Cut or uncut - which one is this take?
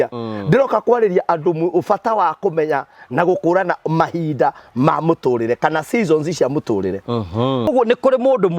cut